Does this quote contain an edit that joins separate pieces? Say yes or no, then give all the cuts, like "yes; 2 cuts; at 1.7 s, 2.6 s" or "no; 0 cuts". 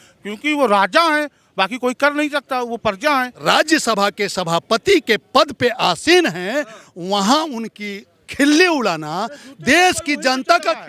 yes; 1 cut; at 3.3 s